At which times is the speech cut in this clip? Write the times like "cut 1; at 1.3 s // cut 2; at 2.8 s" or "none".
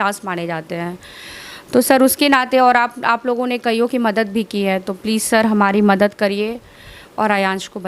none